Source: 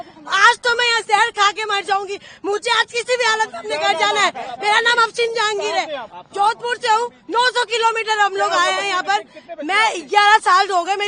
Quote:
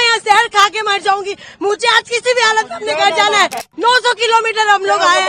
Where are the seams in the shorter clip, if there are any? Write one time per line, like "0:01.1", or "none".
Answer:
0:03.7